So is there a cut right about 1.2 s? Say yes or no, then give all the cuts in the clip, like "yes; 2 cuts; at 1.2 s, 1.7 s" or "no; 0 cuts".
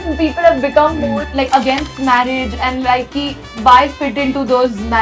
yes; 1 cut; at 1.2 s